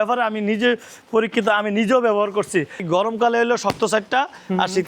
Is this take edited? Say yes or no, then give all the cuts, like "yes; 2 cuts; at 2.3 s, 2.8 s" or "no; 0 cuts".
yes; 1 cut; at 2.8 s